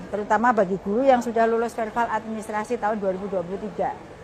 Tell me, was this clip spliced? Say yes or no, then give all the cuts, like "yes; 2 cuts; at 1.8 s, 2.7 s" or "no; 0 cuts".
no; 0 cuts